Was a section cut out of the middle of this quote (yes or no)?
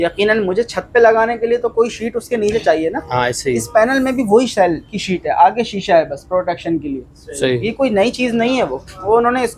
no